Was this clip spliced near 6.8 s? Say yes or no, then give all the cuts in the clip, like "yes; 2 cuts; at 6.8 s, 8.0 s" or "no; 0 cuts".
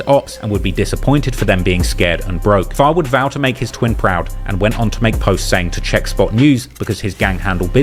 no; 0 cuts